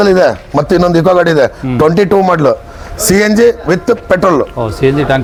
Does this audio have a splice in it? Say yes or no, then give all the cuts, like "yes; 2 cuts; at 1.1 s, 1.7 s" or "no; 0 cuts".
no; 0 cuts